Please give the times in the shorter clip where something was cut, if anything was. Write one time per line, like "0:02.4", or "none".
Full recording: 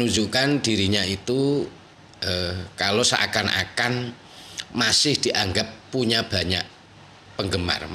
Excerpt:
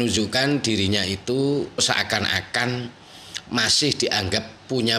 0:01.8

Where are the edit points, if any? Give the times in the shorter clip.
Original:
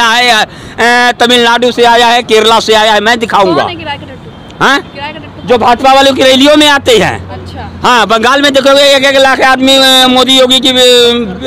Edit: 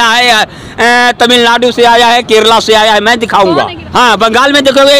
0:03.8

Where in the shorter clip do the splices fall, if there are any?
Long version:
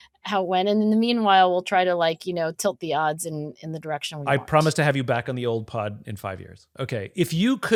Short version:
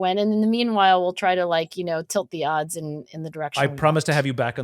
0:03.5

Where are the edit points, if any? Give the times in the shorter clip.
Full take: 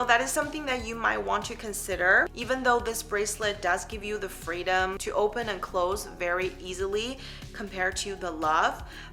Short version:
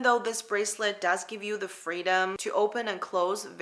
none

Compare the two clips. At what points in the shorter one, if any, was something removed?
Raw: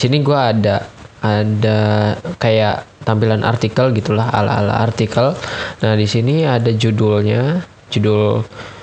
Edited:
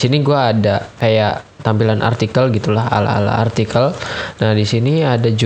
0:00.9

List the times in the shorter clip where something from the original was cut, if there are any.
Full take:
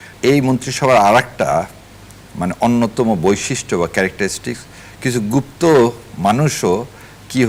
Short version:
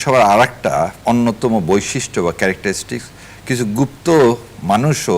0:01.0

